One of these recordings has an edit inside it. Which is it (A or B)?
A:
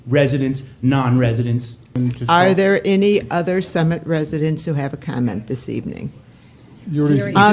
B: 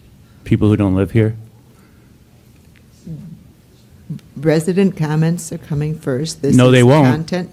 A